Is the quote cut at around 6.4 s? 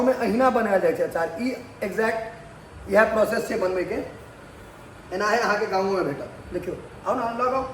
no; 0 cuts

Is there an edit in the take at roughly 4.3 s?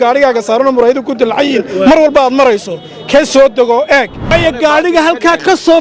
yes; 1 cut; at 4.3 s

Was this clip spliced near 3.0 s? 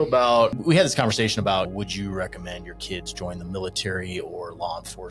no; 1 cut; at 1.7 s

